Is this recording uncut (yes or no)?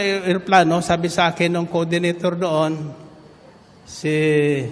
yes